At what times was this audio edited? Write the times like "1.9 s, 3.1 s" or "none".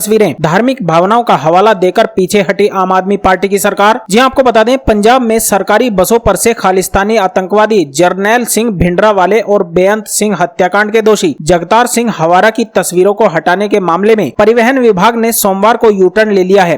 none